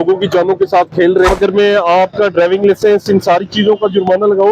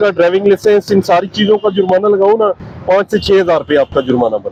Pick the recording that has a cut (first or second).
first